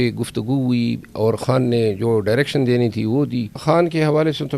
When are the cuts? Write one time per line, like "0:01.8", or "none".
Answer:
0:03.6